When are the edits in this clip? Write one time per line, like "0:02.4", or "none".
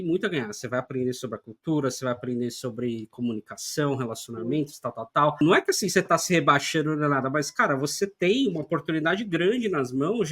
0:05.4